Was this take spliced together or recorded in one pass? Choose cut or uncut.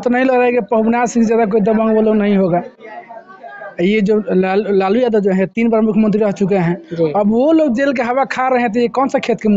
uncut